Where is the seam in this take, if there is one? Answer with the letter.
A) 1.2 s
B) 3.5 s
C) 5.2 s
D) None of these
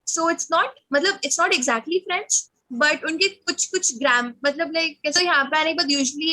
C